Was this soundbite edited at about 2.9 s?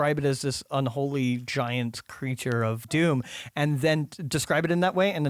yes; 1 cut; at 2.9 s

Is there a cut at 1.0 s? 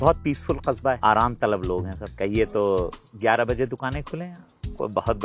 yes; 3 cuts; at 1.0 s, 2.0 s, 3.0 s

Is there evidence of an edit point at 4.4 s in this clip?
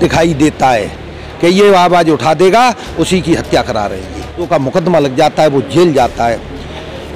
yes; 1 cut; at 4.4 s

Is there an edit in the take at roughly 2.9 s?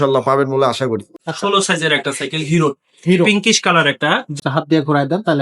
no; 2 cuts; at 1.1 s, 4.4 s

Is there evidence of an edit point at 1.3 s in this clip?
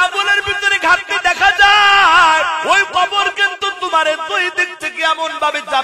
no; 1 cut; at 2.6 s

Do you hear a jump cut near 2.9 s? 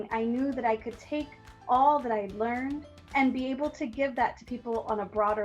yes; 1 cut; at 2.9 s

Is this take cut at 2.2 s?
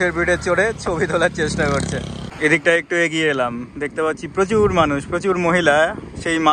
yes; 1 cut; at 2.2 s

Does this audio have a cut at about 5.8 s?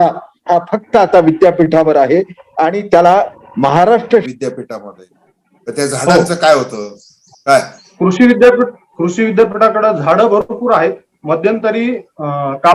no; 1 cut; at 4.2 s

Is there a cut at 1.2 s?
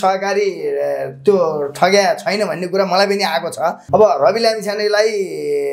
no; 1 cut; at 3.8 s

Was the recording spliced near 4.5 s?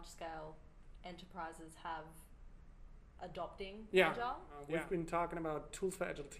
yes; 1 cut; at 4.5 s

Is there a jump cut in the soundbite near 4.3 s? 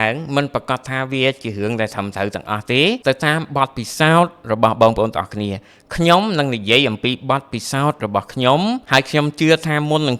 no; 2 cuts; at 3.0 s, 8.8 s

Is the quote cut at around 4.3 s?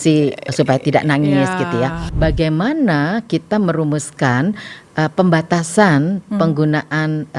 no; 1 cut; at 2.0 s

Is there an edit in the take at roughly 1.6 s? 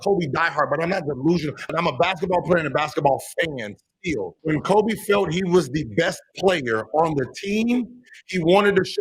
yes; 2 cuts; at 1.6 s, 4.3 s

